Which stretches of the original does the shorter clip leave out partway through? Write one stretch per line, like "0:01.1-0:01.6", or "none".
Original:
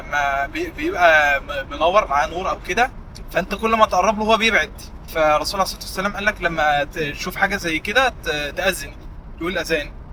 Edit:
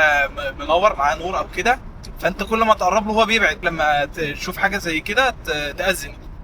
0:04.7-0:06.4

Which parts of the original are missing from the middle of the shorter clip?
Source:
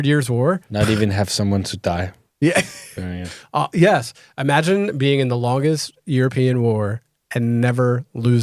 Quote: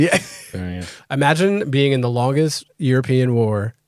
0:03.3-0:04.2

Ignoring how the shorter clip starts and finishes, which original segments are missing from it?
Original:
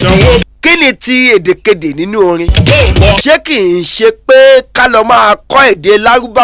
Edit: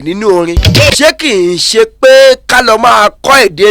0:02.9-0:03.2

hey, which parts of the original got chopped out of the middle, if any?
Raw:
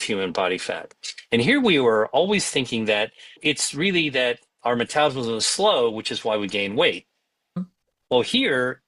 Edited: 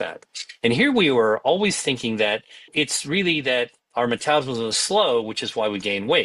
none

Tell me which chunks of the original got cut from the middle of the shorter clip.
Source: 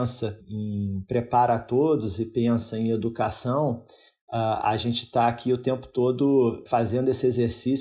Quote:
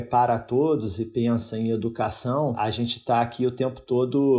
0:03.8-0:04.6

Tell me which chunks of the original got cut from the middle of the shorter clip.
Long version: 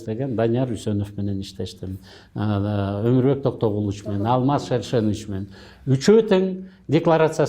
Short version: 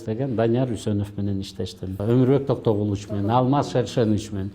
0:02.0-0:03.0

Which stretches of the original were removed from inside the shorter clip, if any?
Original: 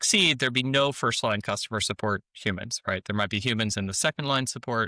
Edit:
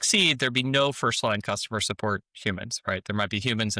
none

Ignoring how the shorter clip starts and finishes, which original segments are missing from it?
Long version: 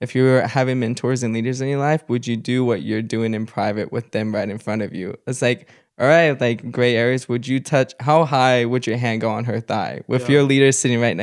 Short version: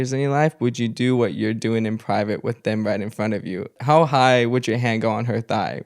0:05.2-0:08.0

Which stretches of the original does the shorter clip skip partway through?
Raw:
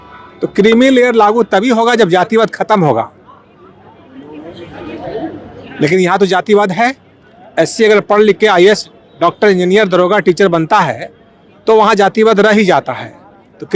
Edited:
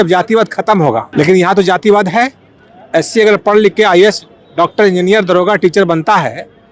0:03.1-0:05.7

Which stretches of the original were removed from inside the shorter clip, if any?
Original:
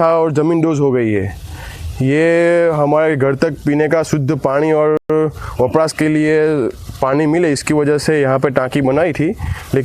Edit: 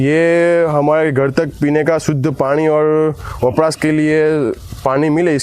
0:05.0-0:05.1

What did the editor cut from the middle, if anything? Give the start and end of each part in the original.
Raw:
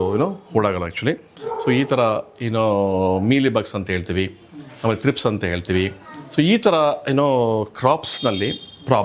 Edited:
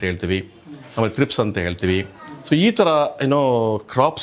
none

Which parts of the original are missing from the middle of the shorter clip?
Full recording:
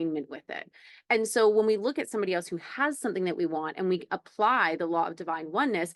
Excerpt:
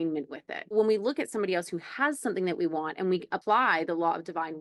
0:00.7-0:01.5
0:04.2-0:04.3

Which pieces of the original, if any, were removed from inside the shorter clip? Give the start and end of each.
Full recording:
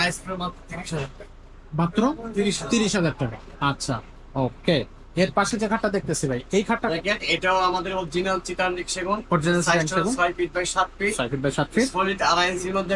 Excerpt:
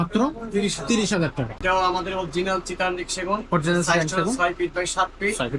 0:03.4-0:07.4

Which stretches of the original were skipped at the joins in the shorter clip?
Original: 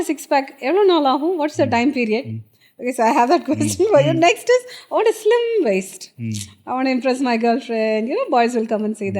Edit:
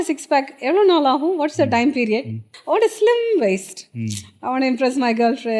0:02.5-0:04.8

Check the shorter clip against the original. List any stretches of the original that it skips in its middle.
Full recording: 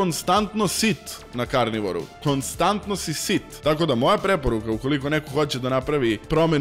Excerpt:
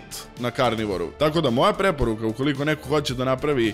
0:02.0-0:03.5

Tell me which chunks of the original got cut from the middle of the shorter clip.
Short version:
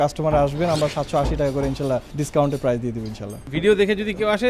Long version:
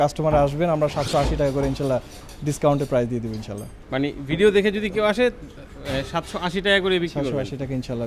0:02.1-0:02.4
0:03.7-0:04.2

